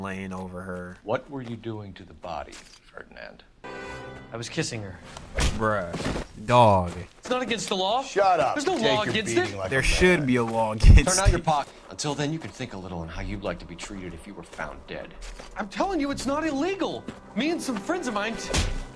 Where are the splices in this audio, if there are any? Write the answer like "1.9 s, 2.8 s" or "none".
1.0 s, 3.6 s, 11.7 s